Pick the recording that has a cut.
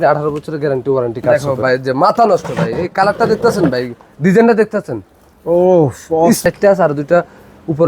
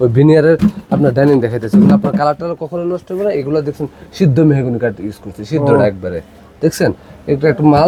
first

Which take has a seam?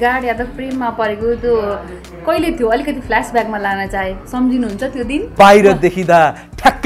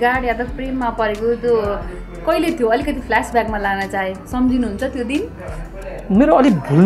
first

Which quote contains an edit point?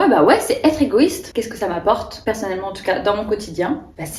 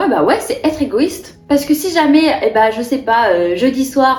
first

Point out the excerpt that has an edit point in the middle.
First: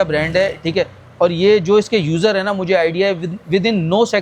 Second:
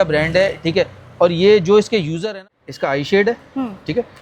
second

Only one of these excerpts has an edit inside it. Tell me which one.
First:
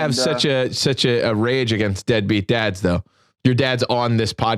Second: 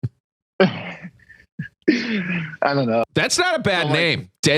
second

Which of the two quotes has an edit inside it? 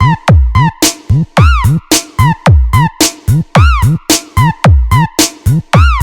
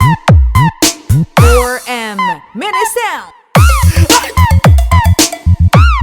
second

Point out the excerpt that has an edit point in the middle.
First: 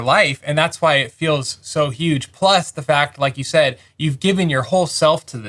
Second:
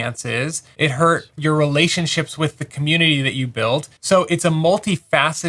second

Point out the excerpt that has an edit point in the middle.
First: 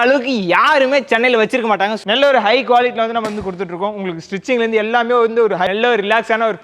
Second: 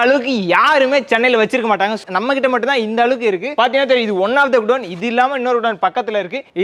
first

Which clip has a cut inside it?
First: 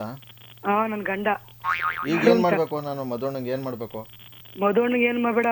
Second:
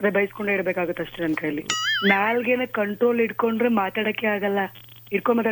second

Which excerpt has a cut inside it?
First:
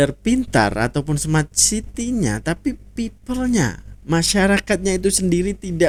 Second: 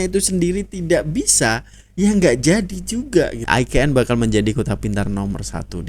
second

